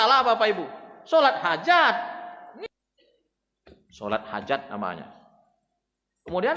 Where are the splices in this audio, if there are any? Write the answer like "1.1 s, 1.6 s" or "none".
2.6 s